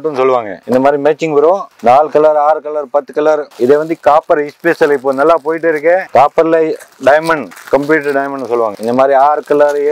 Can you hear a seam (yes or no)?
no